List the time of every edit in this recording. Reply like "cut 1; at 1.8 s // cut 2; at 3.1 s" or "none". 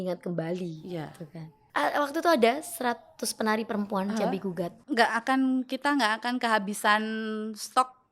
cut 1; at 1.6 s // cut 2; at 4.8 s